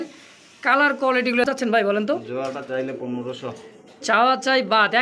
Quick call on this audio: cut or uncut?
cut